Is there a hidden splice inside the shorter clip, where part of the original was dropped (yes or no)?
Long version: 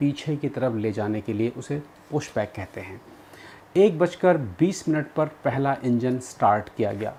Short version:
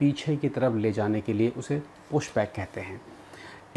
no